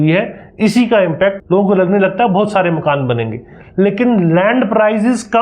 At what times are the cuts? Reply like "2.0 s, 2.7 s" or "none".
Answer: 1.4 s